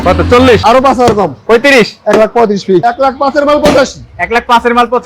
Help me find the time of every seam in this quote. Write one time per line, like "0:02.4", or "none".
0:02.8